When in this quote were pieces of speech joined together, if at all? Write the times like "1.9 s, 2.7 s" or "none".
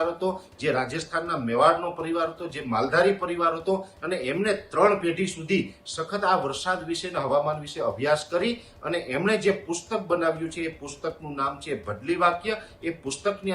none